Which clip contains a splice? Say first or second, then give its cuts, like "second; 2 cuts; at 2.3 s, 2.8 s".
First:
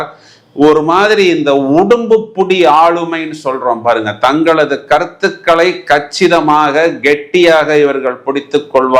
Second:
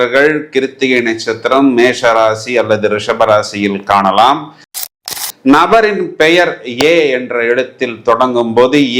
second; 1 cut; at 4.9 s